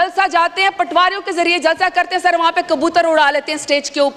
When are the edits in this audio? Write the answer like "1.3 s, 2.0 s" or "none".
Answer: none